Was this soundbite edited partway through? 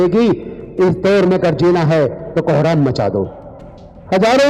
yes; 1 cut; at 3.4 s

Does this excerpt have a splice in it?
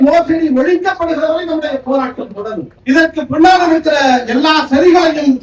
yes; 1 cut; at 2.8 s

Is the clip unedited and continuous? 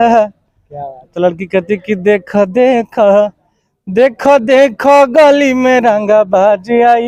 yes; 0 cuts

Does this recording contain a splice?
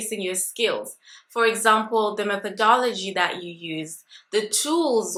no; 0 cuts

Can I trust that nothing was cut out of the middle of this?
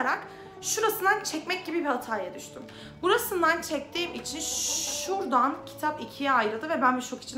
yes; 0 cuts

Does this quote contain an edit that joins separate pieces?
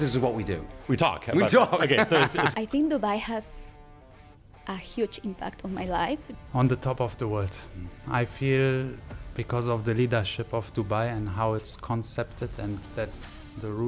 yes; 2 cuts; at 2.5 s, 6.3 s

